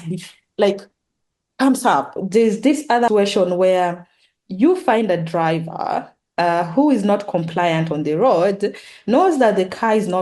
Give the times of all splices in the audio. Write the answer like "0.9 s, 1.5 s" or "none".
2.2 s, 3.1 s